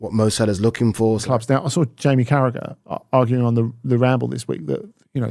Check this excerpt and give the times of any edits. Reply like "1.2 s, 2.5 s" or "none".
1.3 s